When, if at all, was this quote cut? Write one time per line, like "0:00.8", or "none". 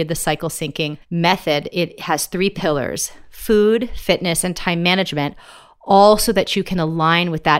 0:01.0